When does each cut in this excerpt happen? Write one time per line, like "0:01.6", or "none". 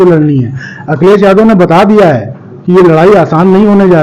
none